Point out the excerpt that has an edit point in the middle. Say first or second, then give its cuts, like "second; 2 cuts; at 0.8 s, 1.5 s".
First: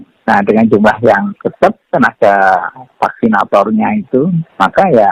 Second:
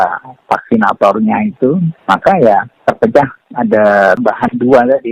second; 1 cut; at 4.2 s